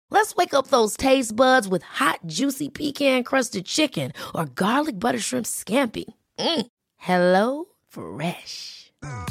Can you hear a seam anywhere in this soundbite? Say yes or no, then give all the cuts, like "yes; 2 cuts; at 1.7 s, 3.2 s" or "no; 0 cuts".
no; 0 cuts